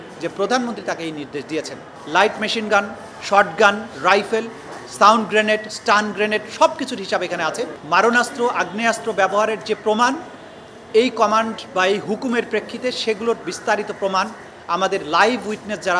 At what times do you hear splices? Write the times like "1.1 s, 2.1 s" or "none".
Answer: 1.9 s, 7.7 s